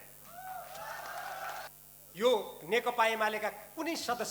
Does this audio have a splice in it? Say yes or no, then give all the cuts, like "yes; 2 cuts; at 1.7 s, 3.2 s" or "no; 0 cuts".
yes; 1 cut; at 1.7 s